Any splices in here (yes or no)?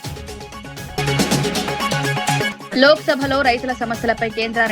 yes